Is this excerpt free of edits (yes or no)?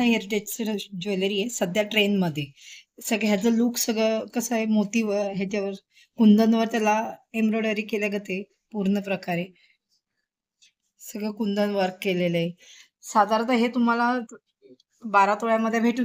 yes